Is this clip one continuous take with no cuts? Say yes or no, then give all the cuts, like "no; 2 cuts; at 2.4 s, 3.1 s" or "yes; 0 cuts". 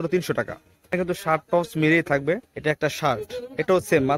no; 2 cuts; at 0.9 s, 2.5 s